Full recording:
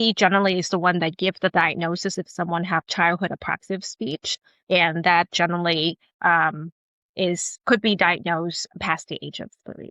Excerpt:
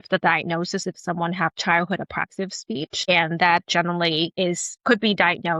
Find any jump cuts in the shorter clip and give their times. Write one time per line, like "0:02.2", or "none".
0:03.1
0:04.3